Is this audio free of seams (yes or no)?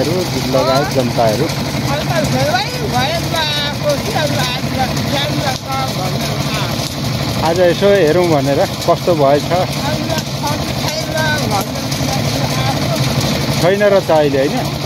yes